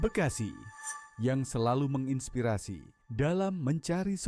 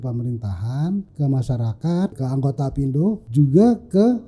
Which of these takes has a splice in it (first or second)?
second